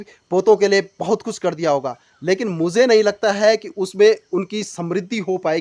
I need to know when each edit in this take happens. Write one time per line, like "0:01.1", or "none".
none